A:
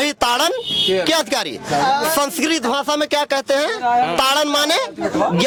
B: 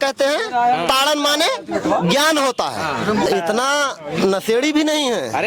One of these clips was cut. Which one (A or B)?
B